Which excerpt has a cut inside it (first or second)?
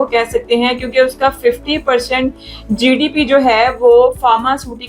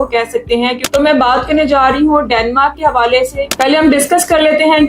second